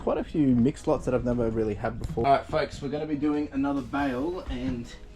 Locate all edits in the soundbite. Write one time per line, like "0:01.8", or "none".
0:02.2